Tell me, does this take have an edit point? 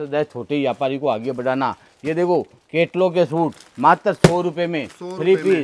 no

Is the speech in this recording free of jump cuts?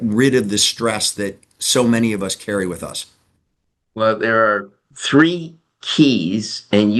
yes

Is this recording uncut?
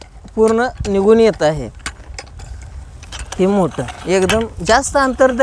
no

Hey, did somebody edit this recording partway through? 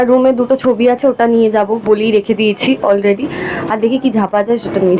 no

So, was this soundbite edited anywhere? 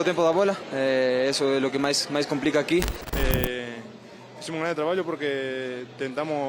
yes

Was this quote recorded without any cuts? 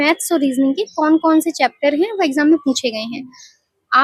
yes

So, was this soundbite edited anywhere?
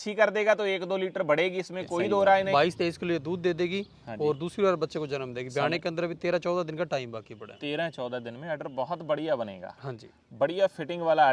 yes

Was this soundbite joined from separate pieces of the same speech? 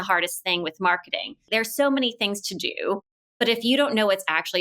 yes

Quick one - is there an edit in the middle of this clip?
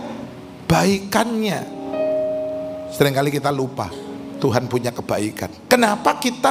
yes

